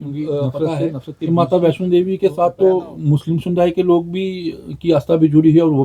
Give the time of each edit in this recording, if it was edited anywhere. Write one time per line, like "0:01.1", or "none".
none